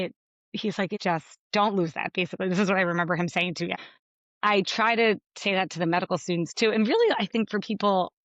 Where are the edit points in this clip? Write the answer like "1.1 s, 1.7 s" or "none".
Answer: 1.1 s, 3.7 s